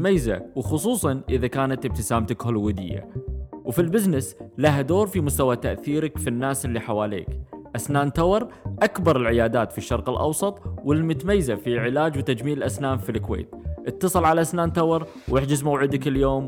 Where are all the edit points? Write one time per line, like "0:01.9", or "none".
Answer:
none